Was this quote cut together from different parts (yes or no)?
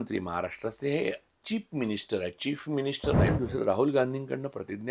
yes